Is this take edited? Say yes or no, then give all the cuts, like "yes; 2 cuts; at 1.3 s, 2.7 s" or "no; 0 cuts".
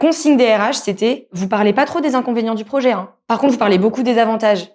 yes; 1 cut; at 1.3 s